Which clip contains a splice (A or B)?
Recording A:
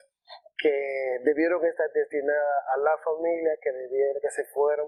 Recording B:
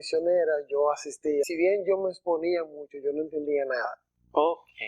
B